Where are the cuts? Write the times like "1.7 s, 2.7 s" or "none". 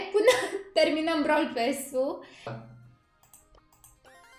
2.6 s